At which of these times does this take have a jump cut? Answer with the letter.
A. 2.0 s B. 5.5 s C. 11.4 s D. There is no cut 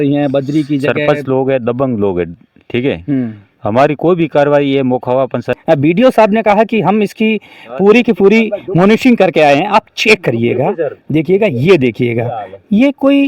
B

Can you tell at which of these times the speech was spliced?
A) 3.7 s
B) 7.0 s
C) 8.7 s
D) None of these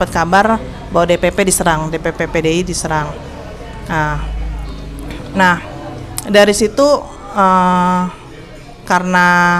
D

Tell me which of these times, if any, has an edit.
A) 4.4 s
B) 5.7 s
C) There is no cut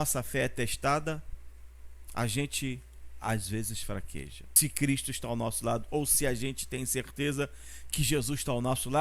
A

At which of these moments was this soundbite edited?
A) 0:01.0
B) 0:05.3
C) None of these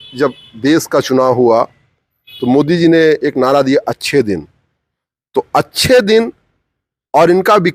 C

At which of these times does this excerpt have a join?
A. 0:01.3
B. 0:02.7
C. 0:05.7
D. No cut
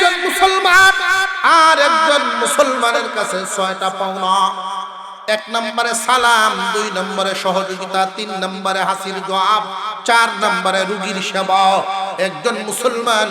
A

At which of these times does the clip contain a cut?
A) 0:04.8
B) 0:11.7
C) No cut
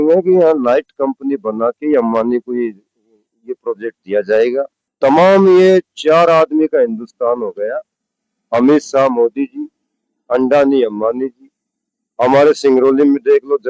A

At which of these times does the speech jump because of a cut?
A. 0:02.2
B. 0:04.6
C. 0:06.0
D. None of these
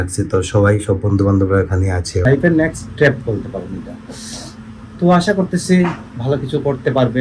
A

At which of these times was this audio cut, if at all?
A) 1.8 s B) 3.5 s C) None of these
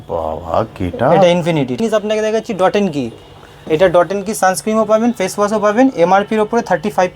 A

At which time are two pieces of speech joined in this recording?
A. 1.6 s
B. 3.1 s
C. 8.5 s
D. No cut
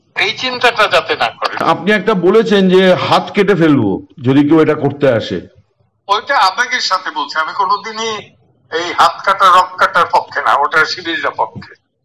A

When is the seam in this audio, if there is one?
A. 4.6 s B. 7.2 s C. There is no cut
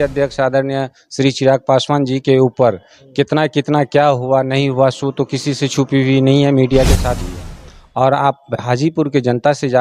B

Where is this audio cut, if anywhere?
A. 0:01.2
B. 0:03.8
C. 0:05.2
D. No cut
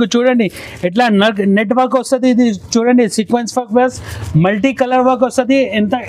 D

